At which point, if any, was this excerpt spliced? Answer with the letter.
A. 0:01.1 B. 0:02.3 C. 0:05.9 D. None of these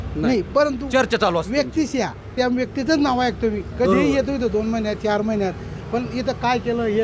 B